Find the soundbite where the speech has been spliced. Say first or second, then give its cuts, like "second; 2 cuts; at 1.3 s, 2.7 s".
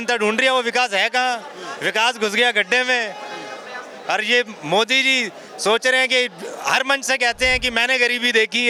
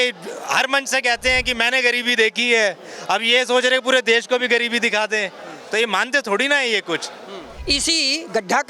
second; 1 cut; at 7.5 s